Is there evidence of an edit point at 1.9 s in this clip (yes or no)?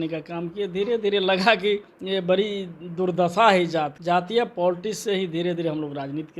yes